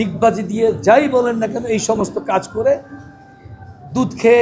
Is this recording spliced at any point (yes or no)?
no